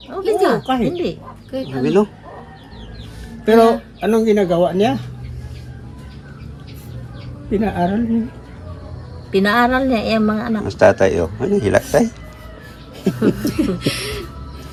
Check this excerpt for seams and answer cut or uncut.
uncut